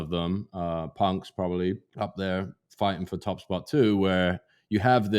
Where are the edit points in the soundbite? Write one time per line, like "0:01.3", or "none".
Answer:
0:01.9